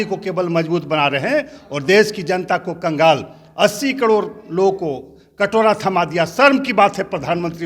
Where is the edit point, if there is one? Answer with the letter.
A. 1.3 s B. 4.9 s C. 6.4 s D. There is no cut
D